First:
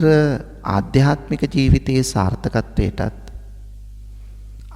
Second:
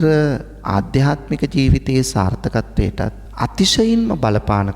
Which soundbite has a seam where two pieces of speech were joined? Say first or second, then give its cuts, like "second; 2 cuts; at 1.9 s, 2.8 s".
second; 1 cut; at 3.2 s